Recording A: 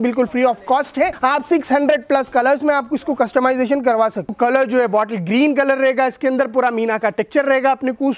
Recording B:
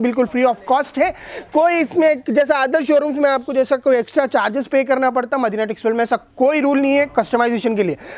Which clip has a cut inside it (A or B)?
A